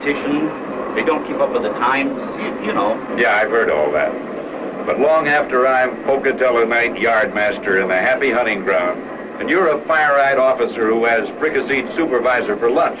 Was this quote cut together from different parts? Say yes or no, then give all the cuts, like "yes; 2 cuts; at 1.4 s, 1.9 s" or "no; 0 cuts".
yes; 1 cut; at 9.8 s